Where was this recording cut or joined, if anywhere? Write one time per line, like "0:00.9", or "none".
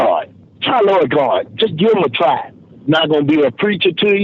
none